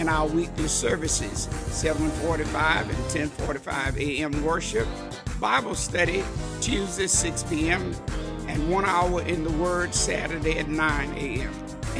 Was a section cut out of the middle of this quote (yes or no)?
no